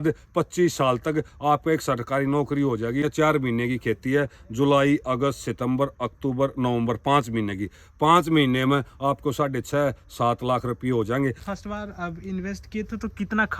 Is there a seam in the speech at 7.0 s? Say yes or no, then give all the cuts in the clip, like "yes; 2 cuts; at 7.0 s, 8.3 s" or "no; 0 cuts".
no; 2 cuts; at 3.1 s, 11.4 s